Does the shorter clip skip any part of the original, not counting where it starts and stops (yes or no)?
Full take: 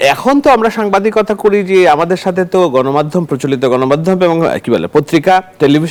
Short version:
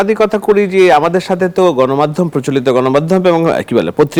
no